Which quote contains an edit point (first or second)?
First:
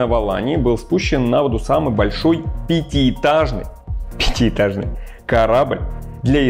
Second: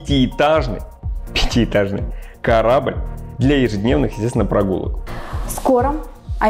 second